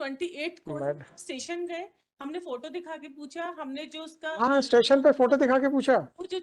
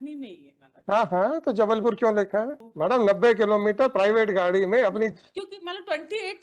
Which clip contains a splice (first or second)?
second